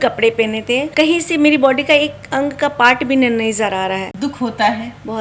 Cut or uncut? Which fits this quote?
cut